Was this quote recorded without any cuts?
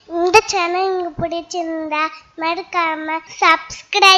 no; 1 cut; at 3.3 s

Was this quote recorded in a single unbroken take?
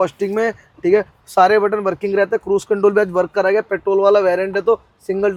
yes; 0 cuts

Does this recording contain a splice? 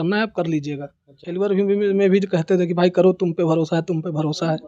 yes; 1 cut; at 1.2 s

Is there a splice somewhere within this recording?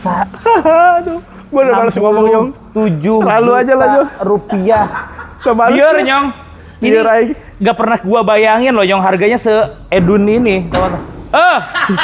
yes; 1 cut; at 10.3 s

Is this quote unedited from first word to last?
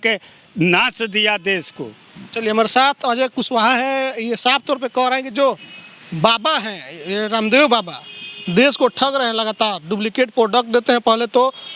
yes; 0 cuts

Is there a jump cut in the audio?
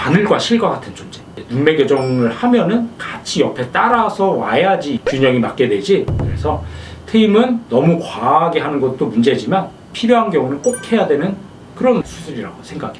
no; 0 cuts

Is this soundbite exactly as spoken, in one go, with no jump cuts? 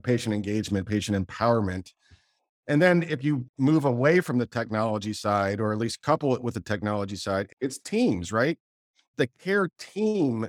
no; 3 cuts; at 3.5 s, 7.5 s, 9.1 s

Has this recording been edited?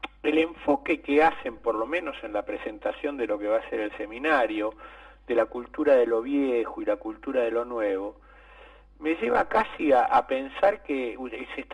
no; 0 cuts

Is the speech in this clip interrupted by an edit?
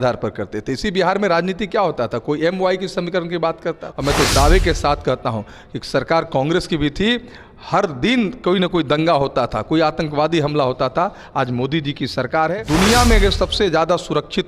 yes; 2 cuts; at 3.9 s, 12.5 s

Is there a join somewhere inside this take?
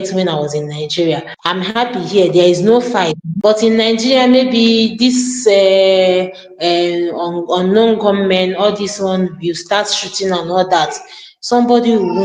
yes; 2 cuts; at 1.3 s, 3.3 s

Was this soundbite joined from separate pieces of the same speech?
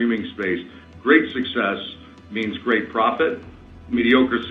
no; 0 cuts

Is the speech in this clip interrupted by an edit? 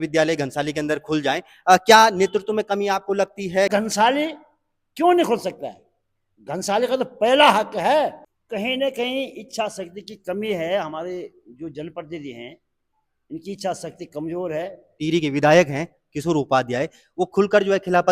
yes; 3 cuts; at 3.7 s, 8.3 s, 15.0 s

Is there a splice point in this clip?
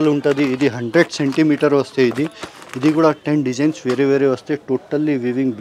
no; 0 cuts

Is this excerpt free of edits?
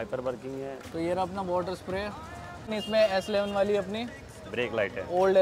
no; 2 cuts; at 0.8 s, 2.7 s

